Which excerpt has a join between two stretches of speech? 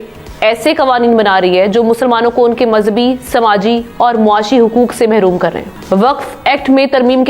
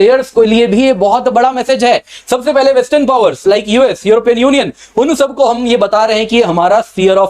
first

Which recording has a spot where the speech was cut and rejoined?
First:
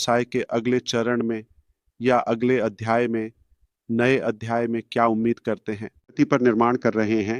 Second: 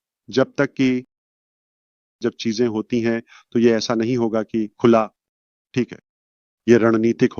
first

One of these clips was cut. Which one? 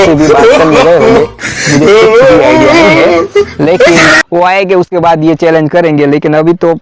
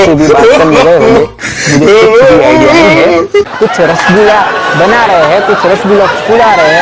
second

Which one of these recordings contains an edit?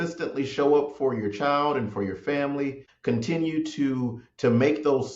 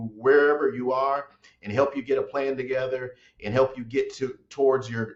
first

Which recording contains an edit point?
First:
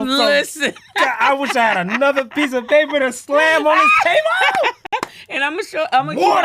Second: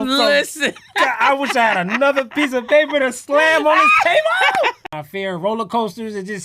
second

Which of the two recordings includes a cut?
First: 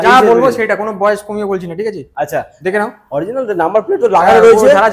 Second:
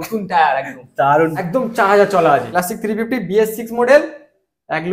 second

